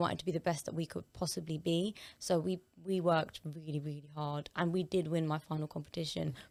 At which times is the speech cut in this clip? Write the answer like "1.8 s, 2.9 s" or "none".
none